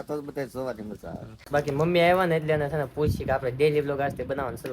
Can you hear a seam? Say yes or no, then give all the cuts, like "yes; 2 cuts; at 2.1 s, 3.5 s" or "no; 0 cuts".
yes; 1 cut; at 1.4 s